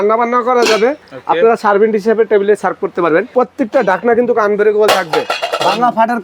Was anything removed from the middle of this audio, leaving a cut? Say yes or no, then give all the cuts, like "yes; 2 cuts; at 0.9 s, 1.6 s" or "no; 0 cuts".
yes; 1 cut; at 3.3 s